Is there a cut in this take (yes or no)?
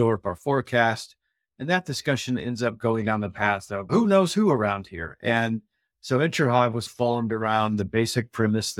yes